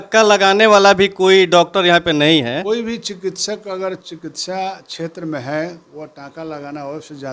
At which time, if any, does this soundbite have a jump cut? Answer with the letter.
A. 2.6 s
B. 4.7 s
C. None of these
A